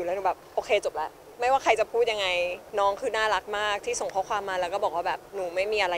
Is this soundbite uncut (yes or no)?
no